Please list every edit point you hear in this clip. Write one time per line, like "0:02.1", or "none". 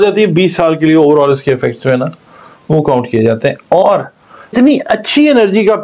0:04.5